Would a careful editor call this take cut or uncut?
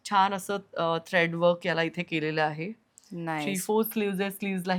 uncut